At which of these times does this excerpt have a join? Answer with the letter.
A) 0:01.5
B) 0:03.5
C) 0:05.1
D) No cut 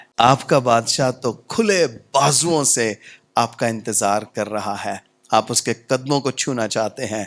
D